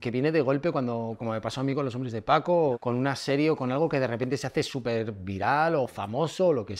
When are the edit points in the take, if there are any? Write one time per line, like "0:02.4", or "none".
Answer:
0:02.8